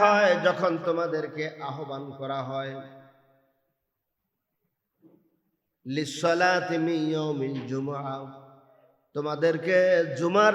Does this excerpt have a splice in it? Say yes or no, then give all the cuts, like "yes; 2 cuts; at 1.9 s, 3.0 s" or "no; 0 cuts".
no; 0 cuts